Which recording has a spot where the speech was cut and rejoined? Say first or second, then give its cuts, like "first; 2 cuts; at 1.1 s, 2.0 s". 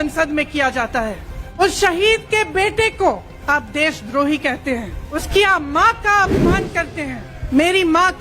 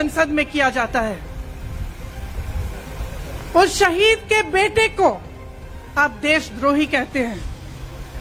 first; 4 cuts; at 1.6 s, 3.3 s, 5.1 s, 7.3 s